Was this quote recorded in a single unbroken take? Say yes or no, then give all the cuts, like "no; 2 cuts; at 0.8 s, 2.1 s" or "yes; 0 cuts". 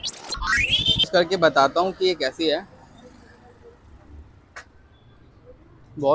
no; 1 cut; at 1.1 s